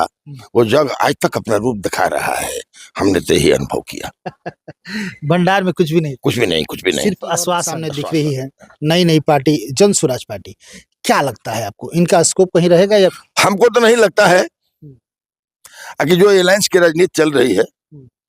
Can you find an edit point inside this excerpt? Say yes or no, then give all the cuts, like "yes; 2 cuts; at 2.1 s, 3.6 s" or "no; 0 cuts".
yes; 2 cuts; at 7.9 s, 13.1 s